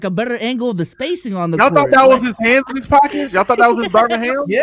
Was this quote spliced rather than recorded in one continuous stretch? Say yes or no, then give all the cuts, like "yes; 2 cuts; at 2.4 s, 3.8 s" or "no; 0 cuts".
no; 0 cuts